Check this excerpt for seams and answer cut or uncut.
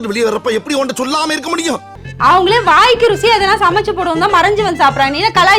cut